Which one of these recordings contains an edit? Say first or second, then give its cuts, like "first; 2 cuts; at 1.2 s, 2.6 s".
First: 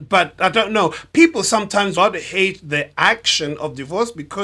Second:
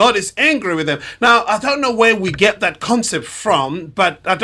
first; 1 cut; at 1.9 s